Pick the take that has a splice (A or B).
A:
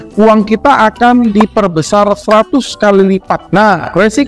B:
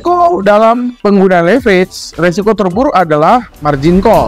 A